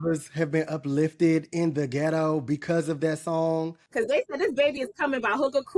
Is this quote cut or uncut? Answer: cut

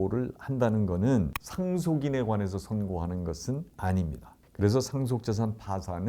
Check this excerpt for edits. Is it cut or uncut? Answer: cut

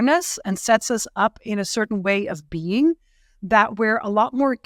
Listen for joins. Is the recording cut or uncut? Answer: uncut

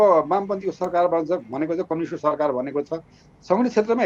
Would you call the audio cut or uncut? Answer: uncut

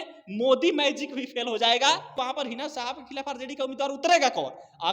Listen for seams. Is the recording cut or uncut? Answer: cut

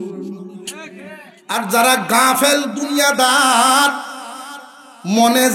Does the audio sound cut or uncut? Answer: cut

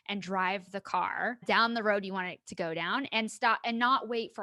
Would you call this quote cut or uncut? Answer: cut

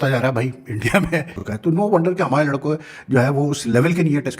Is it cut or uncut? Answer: cut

